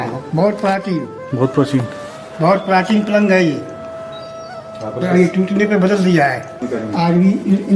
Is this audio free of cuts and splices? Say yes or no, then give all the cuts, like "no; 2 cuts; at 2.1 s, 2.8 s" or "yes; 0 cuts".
no; 1 cut; at 6.5 s